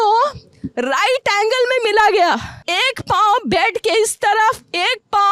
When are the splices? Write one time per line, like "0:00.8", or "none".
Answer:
0:02.5